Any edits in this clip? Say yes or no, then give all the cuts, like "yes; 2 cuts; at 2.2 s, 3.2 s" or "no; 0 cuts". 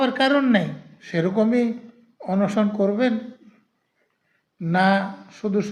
yes; 1 cut; at 0.9 s